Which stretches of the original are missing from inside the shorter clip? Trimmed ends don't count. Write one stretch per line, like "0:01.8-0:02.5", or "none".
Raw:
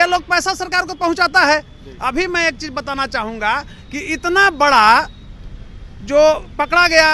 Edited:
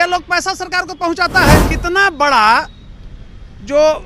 0:01.7-0:04.1